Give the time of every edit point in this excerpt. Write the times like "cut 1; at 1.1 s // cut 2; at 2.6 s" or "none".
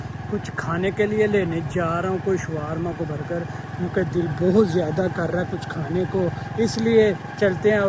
none

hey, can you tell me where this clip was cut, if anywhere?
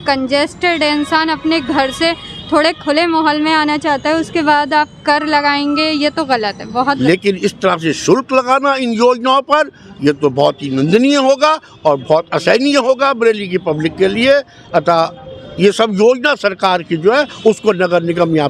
cut 1; at 7.0 s

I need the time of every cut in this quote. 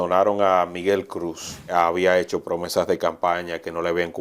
cut 1; at 1.7 s

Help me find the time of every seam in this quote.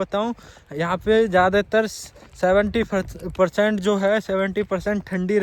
none

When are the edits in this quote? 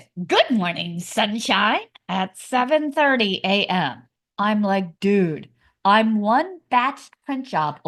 none

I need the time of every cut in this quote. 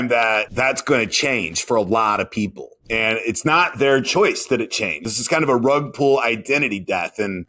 cut 1; at 5.1 s

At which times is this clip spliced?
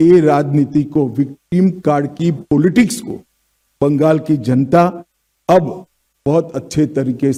none

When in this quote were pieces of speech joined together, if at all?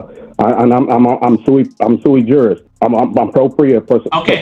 cut 1; at 2.7 s

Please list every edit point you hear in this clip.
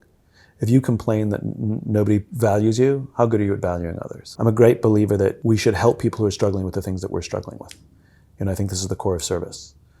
cut 1; at 4.2 s // cut 2; at 5.4 s

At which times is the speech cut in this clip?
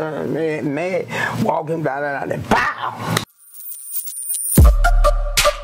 cut 1; at 3.3 s

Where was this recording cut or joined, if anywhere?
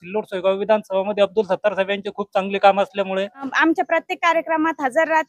cut 1; at 3.5 s

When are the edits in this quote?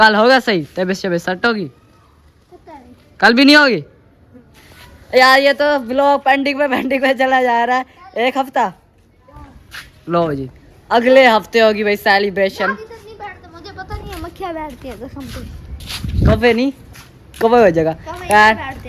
none

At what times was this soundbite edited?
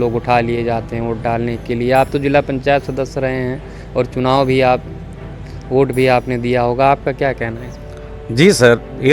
none

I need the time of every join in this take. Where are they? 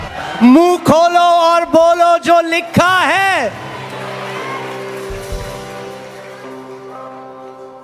none

